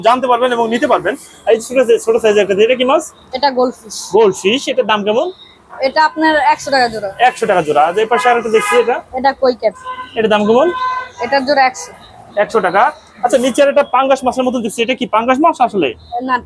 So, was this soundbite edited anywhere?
no; 0 cuts

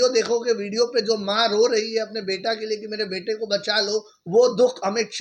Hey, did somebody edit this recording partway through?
no; 0 cuts

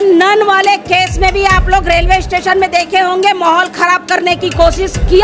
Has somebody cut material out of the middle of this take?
no; 0 cuts

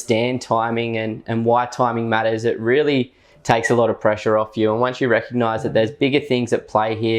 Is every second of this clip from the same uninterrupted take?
yes; 0 cuts

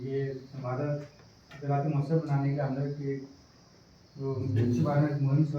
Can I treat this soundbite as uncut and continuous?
yes; 0 cuts

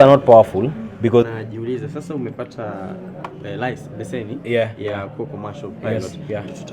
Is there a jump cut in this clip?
yes; 1 cut; at 1.3 s

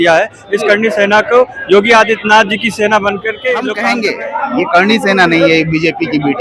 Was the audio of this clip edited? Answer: yes; 1 cut; at 3.7 s

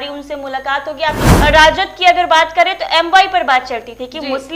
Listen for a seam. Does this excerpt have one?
yes; 1 cut; at 1.3 s

